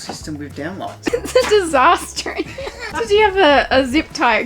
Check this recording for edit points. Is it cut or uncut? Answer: cut